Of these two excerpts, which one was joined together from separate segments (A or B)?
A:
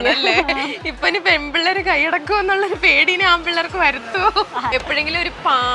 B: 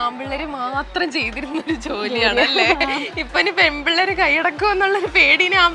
A